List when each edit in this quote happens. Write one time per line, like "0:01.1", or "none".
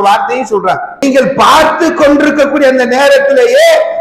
0:00.9